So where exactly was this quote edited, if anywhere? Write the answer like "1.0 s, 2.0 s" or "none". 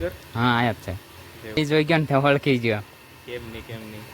1.5 s